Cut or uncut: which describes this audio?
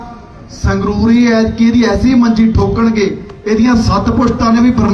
uncut